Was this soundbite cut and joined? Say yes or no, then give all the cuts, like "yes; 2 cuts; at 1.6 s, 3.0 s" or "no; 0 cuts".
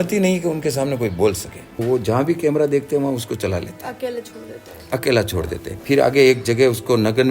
yes; 2 cuts; at 1.7 s, 5.7 s